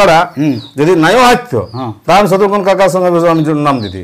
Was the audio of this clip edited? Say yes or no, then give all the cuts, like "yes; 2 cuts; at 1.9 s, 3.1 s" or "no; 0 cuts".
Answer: no; 0 cuts